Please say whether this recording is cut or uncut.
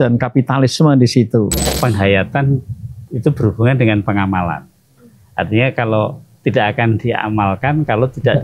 cut